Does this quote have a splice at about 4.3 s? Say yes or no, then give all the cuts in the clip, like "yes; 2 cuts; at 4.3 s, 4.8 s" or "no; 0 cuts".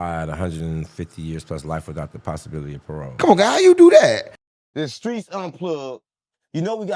yes; 1 cut; at 4.3 s